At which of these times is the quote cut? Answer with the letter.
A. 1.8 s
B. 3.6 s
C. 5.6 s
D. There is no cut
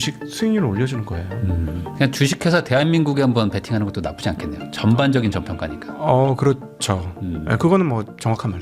A